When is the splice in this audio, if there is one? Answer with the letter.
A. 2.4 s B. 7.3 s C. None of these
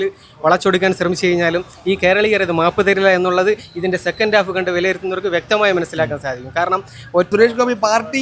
B